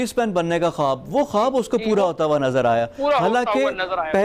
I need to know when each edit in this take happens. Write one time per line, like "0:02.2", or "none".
none